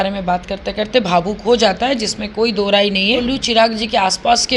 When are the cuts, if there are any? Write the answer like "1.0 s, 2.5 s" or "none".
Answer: 3.2 s